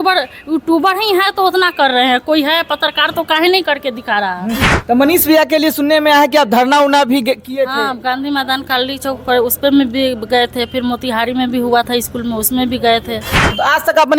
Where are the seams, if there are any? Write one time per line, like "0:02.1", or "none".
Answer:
0:04.7
0:13.3